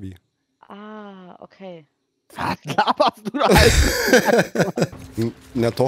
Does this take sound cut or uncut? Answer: cut